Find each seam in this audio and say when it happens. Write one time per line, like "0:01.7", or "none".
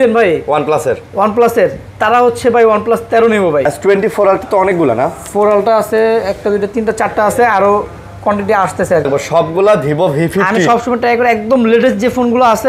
0:03.7
0:09.1